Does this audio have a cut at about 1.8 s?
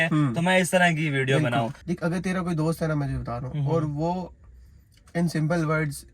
yes; 1 cut; at 1.8 s

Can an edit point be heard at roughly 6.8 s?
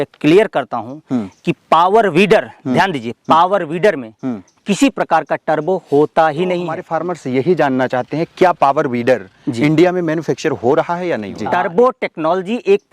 yes; 2 cuts; at 6.8 s, 11.3 s

